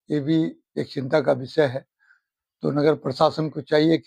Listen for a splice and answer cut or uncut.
uncut